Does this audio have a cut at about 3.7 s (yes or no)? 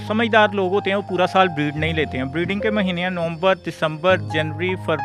no